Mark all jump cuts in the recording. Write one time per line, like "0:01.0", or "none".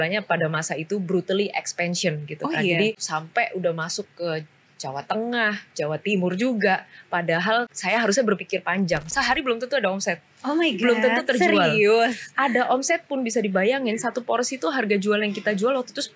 0:03.0
0:07.8
0:09.1